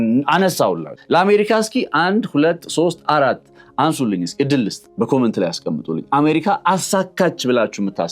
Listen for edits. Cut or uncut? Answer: cut